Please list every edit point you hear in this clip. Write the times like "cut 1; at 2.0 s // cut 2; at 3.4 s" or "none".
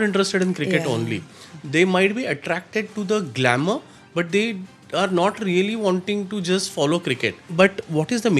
cut 1; at 7.4 s